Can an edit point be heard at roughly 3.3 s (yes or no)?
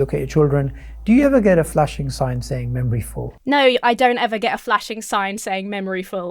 yes